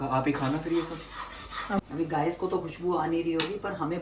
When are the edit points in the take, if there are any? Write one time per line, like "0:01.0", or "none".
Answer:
0:01.8

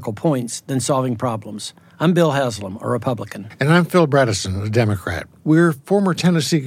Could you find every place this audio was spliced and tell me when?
none

